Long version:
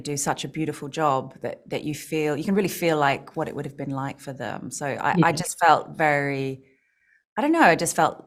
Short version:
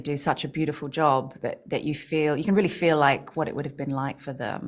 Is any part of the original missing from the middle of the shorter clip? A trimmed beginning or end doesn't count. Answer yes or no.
no